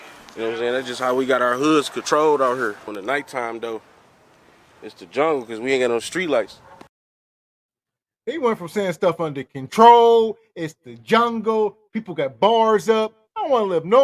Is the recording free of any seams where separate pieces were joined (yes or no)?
yes